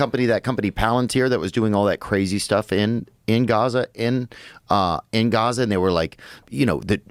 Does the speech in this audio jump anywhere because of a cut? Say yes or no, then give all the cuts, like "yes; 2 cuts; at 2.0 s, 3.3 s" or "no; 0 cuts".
no; 0 cuts